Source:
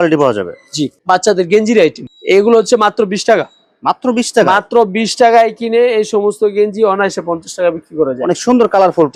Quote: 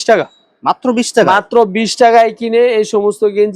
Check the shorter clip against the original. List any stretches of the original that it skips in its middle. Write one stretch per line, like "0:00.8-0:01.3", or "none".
none